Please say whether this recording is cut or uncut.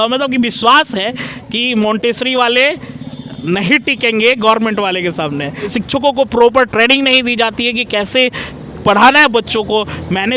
cut